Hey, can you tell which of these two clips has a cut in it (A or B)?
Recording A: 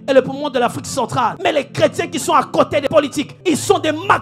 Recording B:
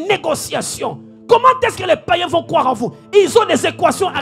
A